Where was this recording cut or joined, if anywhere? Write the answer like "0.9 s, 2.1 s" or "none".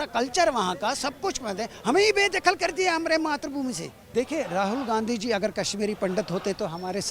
3.9 s